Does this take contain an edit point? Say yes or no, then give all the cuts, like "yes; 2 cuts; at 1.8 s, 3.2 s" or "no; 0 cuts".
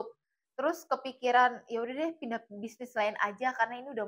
no; 0 cuts